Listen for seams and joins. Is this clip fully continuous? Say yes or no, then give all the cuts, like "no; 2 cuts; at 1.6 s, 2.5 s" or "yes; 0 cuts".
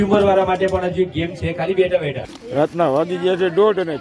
no; 1 cut; at 2.3 s